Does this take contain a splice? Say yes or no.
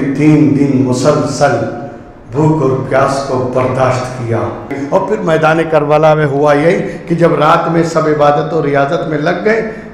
yes